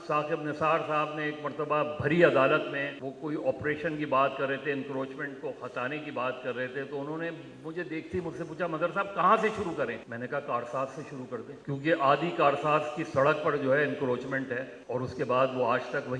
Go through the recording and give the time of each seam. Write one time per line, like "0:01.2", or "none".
0:03.0
0:10.1
0:11.5
0:14.7